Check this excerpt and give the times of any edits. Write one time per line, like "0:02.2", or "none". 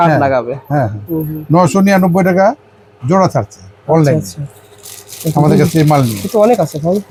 none